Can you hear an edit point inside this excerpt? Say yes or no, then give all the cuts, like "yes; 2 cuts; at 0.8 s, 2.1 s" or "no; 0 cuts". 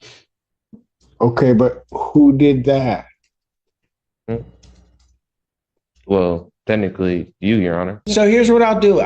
yes; 1 cut; at 8.0 s